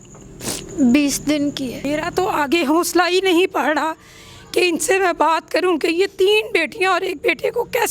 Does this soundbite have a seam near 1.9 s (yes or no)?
yes